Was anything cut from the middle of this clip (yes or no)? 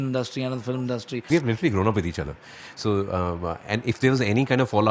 yes